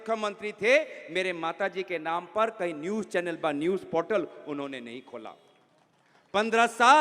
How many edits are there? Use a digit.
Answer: 0